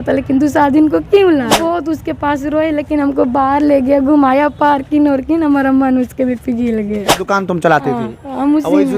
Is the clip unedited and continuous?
no; 2 cuts; at 1.7 s, 7.2 s

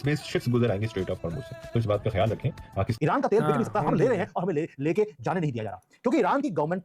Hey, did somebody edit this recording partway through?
yes; 1 cut; at 2.9 s

